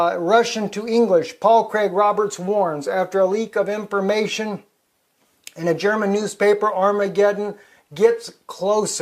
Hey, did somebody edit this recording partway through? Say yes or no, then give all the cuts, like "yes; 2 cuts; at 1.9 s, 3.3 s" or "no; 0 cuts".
yes; 1 cut; at 6.7 s